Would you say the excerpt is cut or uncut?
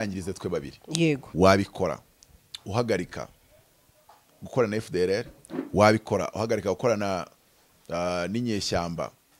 cut